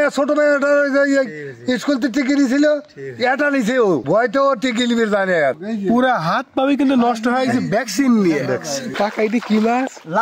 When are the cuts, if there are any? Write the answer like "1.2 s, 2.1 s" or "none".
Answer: 5.6 s, 8.9 s